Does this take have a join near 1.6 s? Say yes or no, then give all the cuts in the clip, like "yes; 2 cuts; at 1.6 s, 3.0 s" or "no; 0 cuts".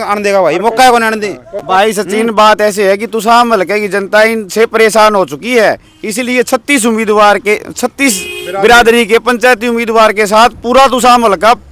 no; 0 cuts